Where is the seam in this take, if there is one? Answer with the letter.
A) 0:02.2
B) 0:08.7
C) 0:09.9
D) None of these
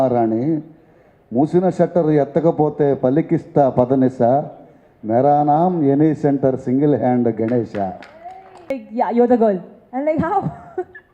B